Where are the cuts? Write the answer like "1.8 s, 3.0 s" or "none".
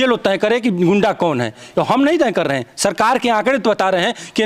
none

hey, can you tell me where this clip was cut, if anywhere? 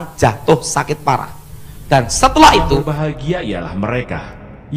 2.9 s

